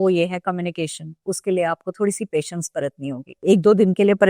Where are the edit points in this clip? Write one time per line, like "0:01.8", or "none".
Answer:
0:03.4